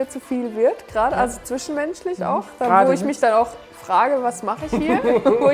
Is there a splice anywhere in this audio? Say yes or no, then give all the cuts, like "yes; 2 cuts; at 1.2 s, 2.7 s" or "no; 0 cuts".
no; 0 cuts